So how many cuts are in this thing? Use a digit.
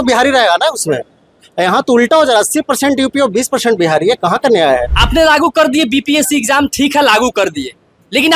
1